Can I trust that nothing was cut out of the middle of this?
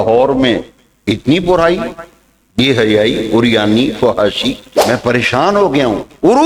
no; 1 cut; at 4.7 s

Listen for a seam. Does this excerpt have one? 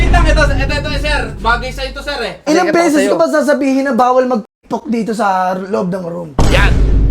yes; 1 cut; at 2.5 s

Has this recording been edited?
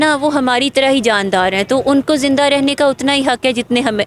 no; 0 cuts

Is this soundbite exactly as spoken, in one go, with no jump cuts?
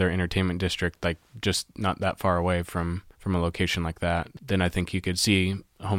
no; 2 cuts; at 3.1 s, 4.3 s

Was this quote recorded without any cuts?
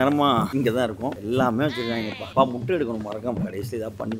yes; 0 cuts

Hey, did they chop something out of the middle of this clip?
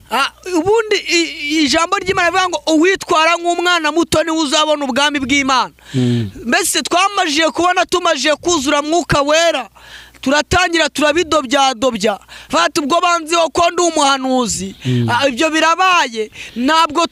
no; 0 cuts

